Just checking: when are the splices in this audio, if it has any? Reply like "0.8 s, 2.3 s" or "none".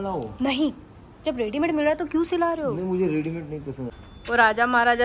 3.8 s